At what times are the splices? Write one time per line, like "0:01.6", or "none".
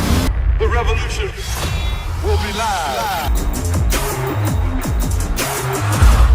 none